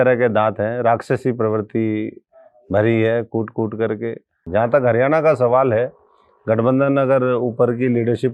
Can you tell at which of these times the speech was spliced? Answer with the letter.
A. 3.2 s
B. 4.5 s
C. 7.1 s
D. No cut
B